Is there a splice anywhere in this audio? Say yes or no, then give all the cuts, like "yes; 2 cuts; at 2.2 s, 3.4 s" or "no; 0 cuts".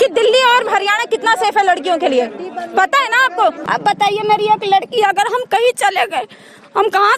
yes; 1 cut; at 3.6 s